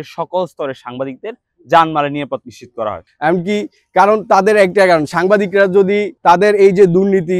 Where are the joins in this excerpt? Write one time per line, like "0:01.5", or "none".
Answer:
0:03.0